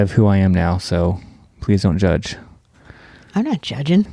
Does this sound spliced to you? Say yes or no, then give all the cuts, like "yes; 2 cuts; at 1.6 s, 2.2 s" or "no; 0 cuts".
no; 0 cuts